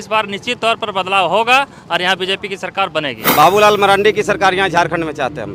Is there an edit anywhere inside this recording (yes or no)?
yes